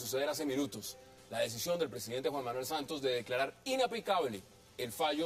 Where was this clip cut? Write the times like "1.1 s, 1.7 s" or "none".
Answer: none